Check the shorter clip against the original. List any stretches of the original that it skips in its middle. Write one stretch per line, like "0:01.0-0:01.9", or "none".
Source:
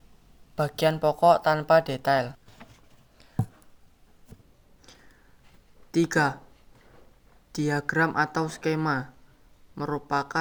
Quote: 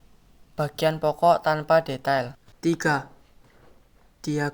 0:02.4-0:05.7

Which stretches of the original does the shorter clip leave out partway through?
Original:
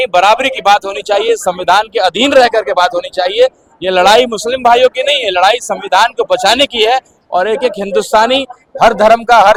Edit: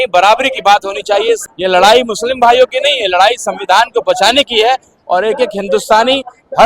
0:01.4-0:03.6

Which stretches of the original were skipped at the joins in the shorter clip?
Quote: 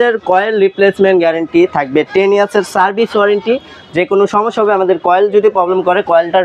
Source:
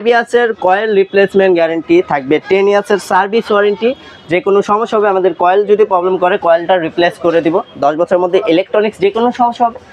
none

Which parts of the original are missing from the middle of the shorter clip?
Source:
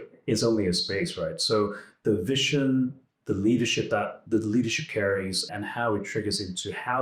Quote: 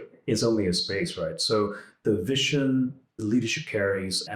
0:03.2-0:04.4

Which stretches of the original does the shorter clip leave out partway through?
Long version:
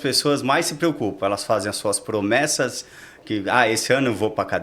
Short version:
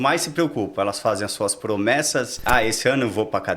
0:02.9-0:03.5

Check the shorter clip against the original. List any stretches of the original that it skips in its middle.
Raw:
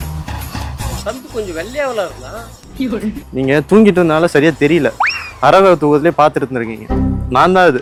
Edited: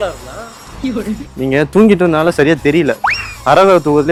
none

